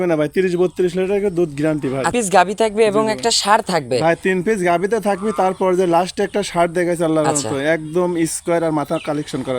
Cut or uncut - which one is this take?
cut